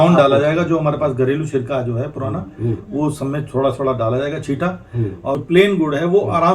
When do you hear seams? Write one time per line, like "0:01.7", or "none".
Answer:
0:05.4

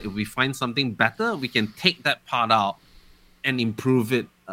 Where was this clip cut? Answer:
none

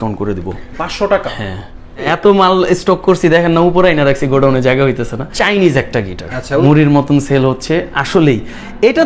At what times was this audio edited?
0:01.9
0:05.2
0:06.6

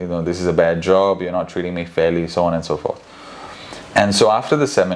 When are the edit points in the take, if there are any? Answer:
none

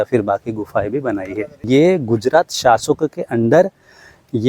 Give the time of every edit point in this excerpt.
0:01.6

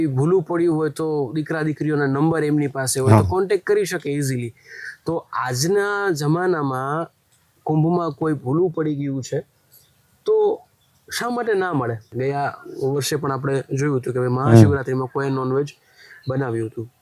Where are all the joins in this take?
0:12.1

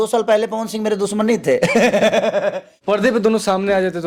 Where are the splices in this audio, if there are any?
0:02.7

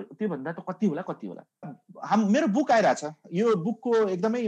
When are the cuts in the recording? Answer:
0:01.8

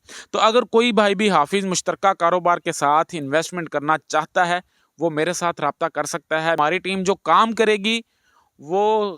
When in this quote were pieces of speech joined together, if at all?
0:06.6

